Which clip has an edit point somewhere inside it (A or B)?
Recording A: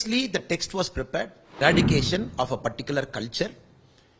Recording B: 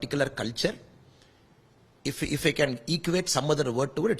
A